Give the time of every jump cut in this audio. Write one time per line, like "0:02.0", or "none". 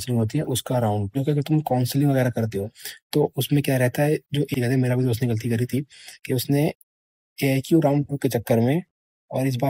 none